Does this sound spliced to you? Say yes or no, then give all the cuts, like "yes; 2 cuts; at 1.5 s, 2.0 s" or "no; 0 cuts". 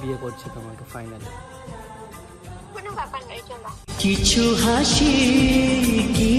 no; 0 cuts